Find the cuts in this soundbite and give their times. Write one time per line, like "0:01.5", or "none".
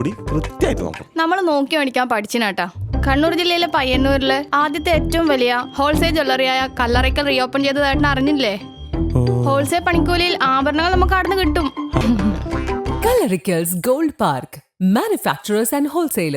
0:12.0

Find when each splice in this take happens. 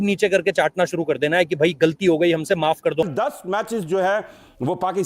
0:03.1

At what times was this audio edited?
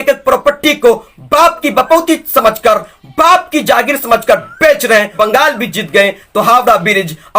0:05.1

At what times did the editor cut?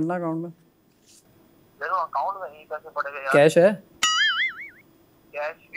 none

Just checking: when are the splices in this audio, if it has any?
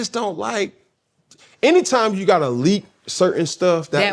none

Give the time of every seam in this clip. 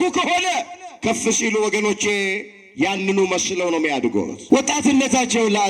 0:04.4

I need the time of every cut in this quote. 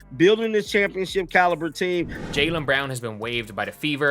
0:02.2

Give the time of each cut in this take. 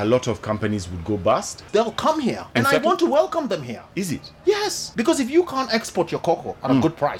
0:01.6
0:02.4
0:03.8
0:04.8

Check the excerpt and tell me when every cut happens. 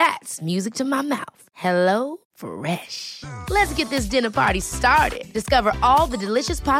none

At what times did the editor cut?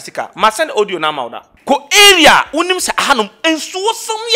0:01.5

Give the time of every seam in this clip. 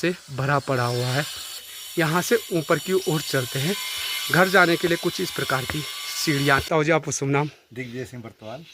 0:01.8
0:06.6

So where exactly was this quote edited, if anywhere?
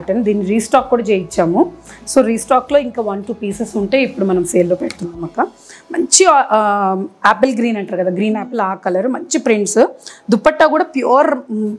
none

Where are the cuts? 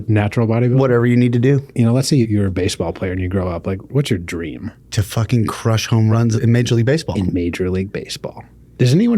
0:02.2
0:03.9
0:04.8
0:06.2

